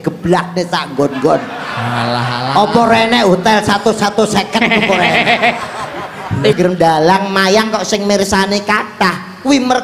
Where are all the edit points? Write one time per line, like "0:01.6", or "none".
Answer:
0:06.5